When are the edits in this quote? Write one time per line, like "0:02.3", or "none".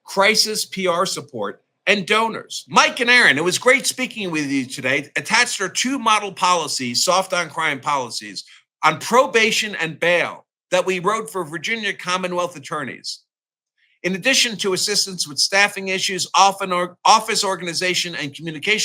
0:02.5